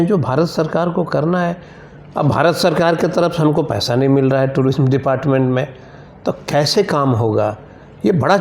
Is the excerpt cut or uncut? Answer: uncut